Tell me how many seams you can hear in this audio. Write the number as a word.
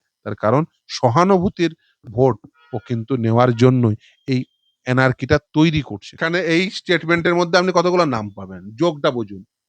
one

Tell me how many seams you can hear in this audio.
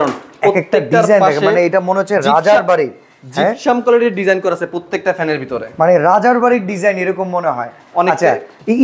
zero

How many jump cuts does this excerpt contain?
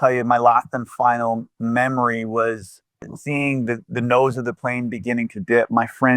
one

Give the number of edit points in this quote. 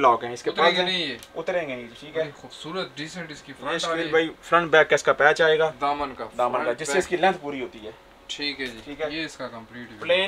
zero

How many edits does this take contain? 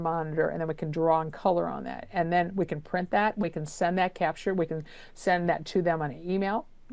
zero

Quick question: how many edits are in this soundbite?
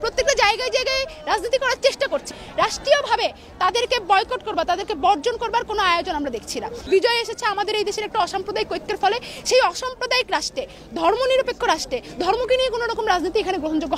two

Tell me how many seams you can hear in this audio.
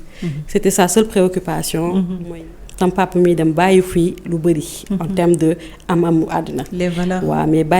one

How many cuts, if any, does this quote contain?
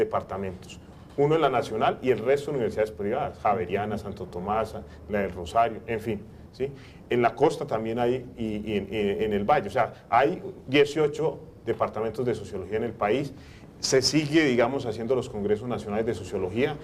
one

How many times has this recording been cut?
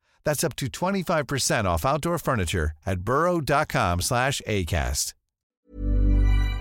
one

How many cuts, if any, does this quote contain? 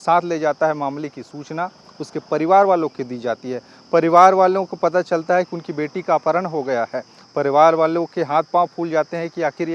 zero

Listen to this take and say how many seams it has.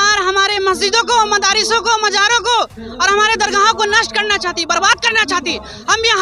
zero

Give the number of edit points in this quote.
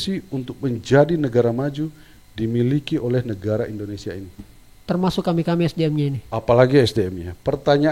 zero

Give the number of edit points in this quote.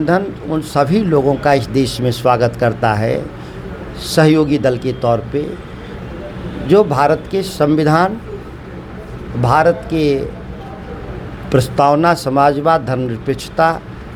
zero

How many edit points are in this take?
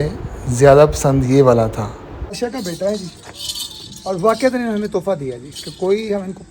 one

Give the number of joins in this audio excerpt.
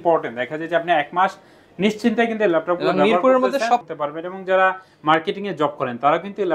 one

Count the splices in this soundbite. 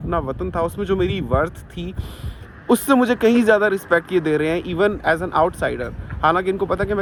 zero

